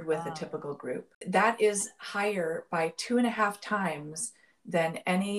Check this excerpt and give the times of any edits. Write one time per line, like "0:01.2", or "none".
0:01.1